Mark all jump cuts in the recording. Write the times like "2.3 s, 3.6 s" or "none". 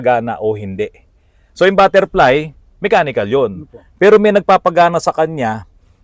none